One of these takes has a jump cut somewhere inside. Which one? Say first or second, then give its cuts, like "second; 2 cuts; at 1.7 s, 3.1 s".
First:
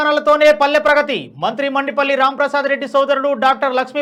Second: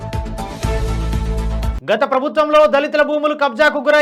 second; 1 cut; at 1.7 s